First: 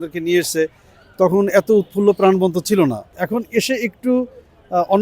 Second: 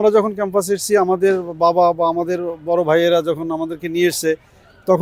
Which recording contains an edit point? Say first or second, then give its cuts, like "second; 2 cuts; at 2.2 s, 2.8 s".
first; 1 cut; at 3.2 s